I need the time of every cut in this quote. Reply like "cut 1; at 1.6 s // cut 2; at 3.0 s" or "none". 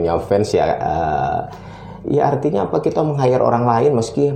none